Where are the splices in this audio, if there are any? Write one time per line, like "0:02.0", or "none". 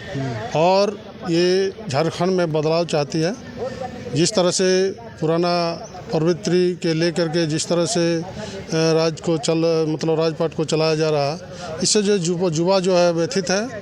none